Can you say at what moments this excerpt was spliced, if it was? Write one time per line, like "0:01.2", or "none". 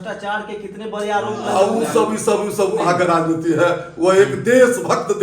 none